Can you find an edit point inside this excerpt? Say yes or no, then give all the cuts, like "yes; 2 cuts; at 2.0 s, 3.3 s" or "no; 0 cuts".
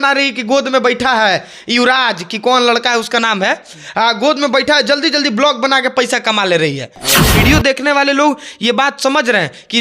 yes; 1 cut; at 7.3 s